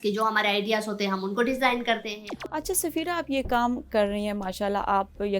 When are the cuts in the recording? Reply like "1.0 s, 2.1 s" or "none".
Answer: 2.3 s